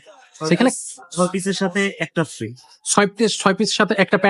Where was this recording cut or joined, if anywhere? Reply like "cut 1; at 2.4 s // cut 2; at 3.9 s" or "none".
none